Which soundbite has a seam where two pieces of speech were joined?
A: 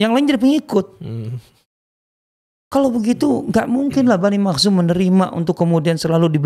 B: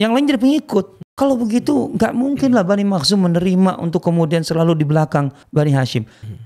B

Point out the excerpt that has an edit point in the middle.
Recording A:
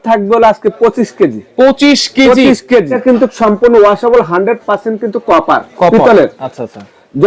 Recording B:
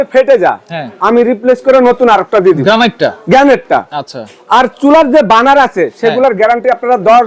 A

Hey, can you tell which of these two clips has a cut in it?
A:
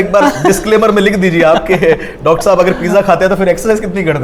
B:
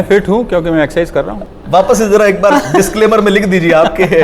B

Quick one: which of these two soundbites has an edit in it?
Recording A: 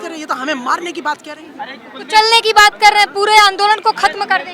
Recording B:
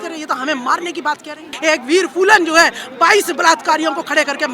B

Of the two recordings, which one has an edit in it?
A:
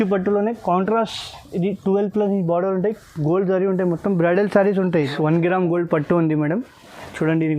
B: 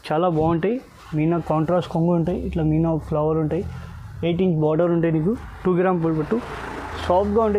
A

